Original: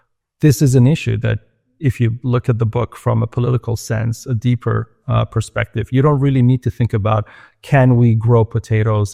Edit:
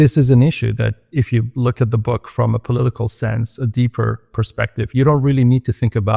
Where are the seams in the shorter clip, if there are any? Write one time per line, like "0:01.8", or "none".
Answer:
0:01.0
0:04.3